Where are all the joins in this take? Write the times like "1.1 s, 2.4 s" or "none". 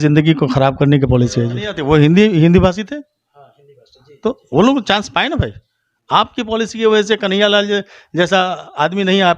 1.7 s

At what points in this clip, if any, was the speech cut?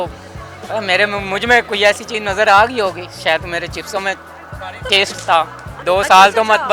5.7 s

